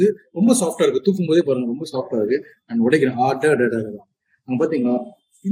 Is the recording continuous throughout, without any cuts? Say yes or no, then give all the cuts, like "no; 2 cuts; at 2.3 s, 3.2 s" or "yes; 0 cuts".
yes; 0 cuts